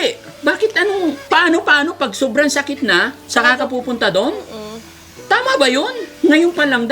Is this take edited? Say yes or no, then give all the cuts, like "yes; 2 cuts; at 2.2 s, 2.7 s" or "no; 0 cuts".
yes; 2 cuts; at 1.2 s, 6.0 s